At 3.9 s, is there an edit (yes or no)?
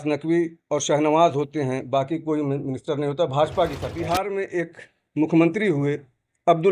yes